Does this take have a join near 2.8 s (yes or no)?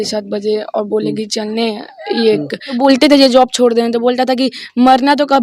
yes